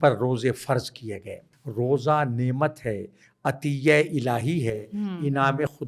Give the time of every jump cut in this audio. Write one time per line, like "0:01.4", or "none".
0:01.5